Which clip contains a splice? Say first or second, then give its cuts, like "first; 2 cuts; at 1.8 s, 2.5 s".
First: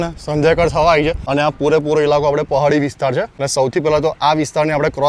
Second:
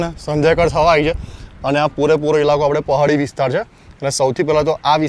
first; 2 cuts; at 1.2 s, 3.4 s